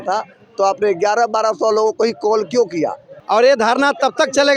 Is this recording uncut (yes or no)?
no